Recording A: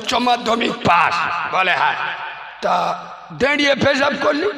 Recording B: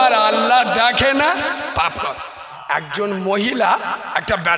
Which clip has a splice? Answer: B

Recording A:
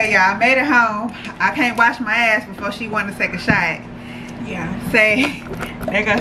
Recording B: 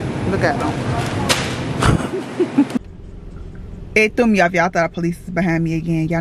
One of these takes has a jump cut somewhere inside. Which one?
B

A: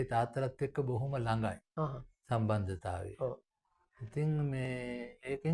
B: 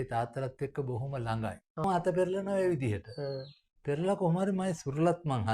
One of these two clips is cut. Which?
B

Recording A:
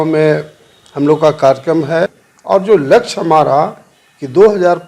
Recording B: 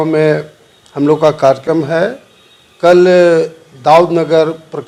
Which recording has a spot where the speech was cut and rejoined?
A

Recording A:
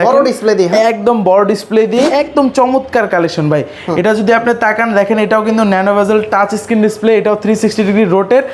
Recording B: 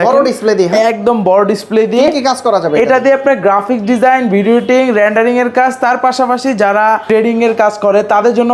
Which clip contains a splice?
A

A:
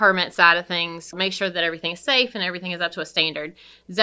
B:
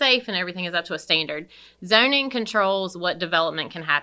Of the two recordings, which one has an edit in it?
A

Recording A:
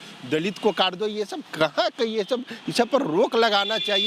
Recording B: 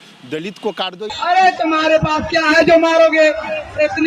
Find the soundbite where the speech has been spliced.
B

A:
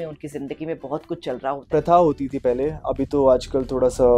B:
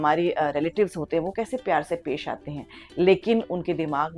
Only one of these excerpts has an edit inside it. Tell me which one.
A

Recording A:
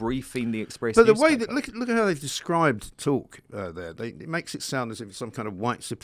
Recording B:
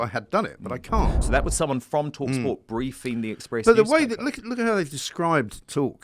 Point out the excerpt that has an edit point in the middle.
B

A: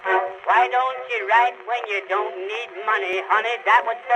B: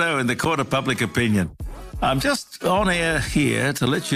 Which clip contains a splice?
A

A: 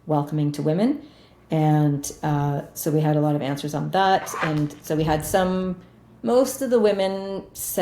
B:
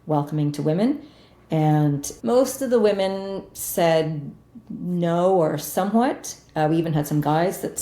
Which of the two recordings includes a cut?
B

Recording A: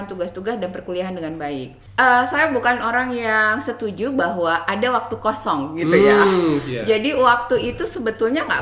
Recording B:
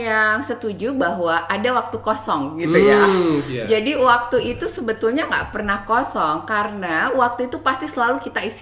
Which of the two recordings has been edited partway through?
A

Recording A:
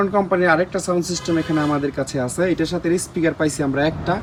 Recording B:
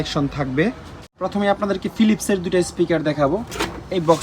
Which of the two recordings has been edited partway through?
B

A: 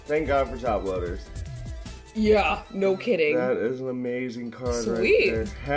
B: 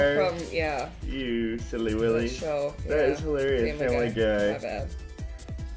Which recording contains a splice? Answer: A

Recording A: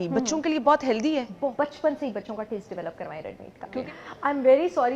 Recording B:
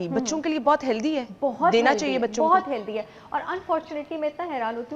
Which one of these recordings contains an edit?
A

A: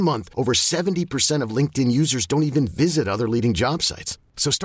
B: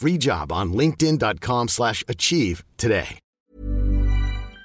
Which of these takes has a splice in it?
B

